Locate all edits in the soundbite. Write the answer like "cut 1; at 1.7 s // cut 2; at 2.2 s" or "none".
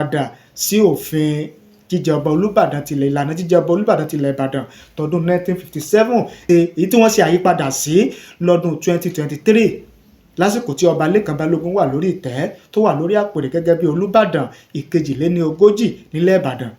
cut 1; at 6.4 s